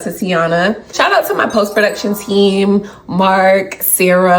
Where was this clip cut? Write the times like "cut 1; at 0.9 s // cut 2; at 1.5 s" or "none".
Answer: cut 1; at 0.9 s